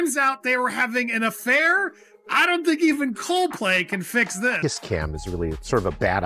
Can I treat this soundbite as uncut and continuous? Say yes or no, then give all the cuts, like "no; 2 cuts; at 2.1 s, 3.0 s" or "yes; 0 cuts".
no; 1 cut; at 4.6 s